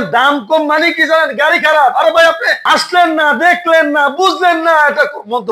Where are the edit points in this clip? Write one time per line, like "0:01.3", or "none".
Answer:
none